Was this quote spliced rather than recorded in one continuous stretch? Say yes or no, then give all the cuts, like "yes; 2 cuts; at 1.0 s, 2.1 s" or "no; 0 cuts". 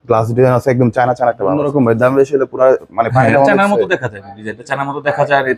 yes; 1 cut; at 1.6 s